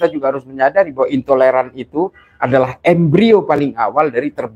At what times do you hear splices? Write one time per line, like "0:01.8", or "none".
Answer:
none

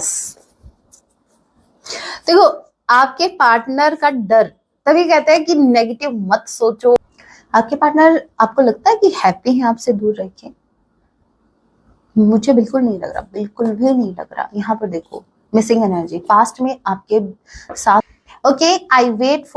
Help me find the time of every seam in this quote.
0:07.0
0:18.1

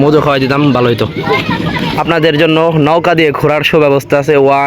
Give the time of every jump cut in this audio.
0:01.8

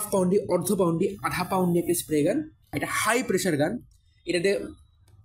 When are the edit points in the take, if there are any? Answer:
0:02.8

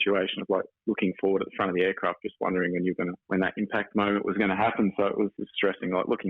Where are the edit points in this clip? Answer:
0:05.4

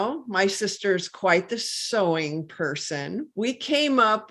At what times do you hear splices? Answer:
0:03.3

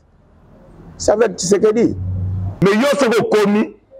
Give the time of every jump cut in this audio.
0:02.6

